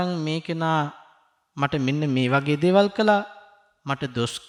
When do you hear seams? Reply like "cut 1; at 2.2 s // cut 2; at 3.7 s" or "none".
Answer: none